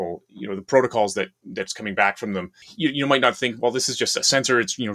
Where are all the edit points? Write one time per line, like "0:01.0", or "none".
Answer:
0:02.6